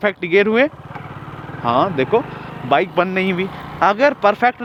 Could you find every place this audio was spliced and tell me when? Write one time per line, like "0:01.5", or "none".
none